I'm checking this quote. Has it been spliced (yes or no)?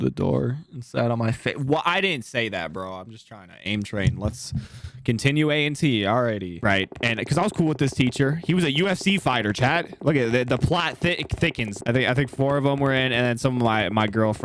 yes